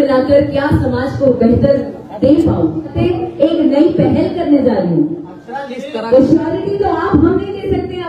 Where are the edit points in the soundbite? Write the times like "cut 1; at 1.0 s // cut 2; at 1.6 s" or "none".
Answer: cut 1; at 2.9 s